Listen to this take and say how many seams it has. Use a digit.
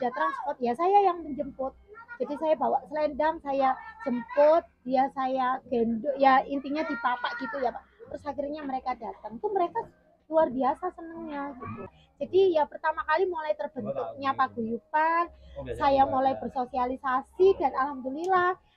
1